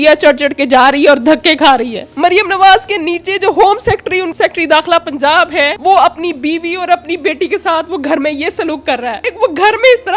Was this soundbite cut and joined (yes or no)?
yes